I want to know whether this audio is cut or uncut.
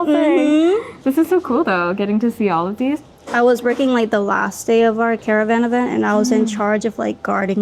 cut